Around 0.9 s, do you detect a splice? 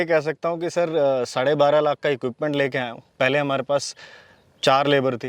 no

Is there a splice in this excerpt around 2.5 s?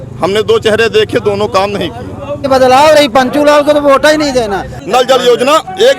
yes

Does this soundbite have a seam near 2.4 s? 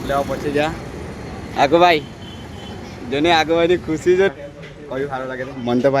no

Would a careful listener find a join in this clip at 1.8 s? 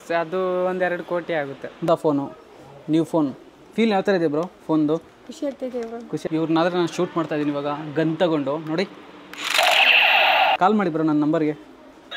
yes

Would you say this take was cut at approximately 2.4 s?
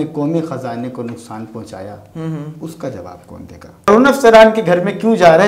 no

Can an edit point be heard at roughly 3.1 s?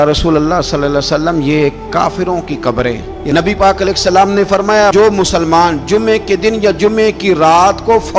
yes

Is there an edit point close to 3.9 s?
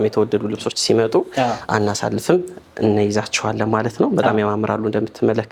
no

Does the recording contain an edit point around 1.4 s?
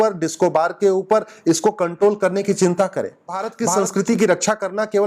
no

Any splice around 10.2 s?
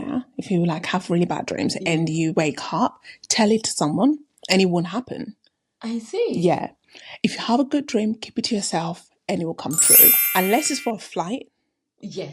yes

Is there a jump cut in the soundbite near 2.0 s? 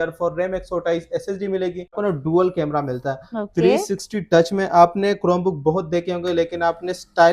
yes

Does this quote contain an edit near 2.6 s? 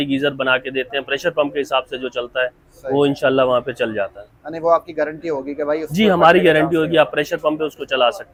no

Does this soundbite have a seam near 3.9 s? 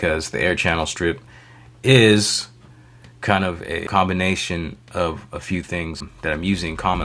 yes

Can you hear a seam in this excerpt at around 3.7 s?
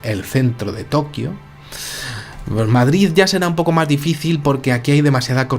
yes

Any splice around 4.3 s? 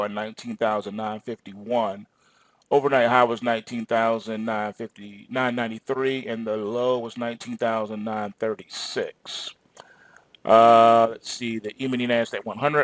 yes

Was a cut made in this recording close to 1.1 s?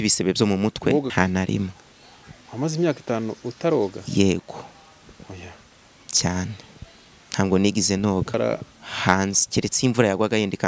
yes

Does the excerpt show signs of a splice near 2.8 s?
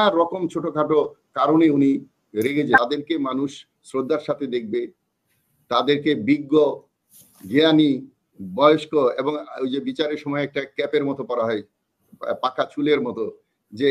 yes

